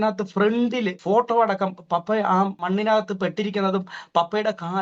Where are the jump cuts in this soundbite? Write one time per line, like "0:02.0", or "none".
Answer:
0:01.0
0:02.6